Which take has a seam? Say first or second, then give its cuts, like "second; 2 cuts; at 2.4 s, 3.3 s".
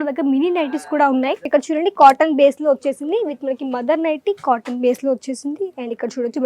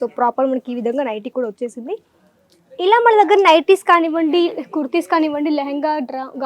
first; 1 cut; at 1.5 s